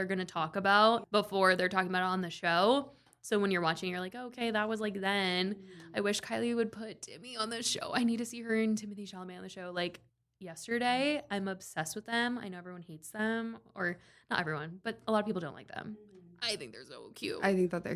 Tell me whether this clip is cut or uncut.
cut